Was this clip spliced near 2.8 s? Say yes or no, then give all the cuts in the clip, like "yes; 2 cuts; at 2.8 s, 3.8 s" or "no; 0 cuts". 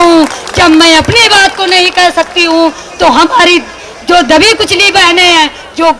no; 0 cuts